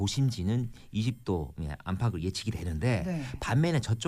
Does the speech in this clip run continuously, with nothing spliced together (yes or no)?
yes